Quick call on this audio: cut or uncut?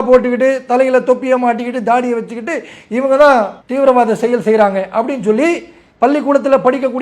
uncut